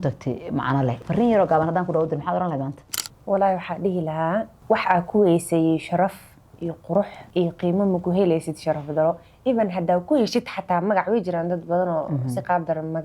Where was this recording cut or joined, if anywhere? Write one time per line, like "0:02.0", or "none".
0:01.0
0:04.5
0:07.2